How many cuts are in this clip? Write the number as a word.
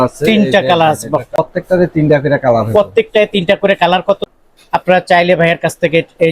two